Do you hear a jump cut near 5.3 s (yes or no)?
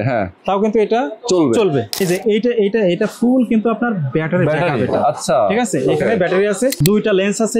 no